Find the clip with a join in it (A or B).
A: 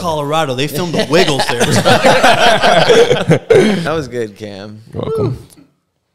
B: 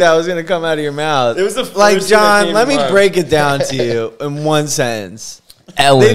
A